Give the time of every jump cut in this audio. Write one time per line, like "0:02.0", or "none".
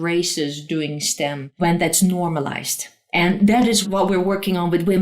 0:01.5